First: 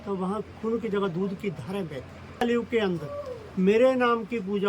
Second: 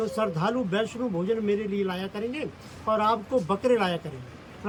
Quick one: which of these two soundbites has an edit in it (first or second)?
first